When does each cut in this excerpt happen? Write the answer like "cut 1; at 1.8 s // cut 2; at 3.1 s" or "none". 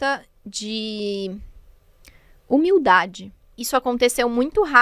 cut 1; at 3.5 s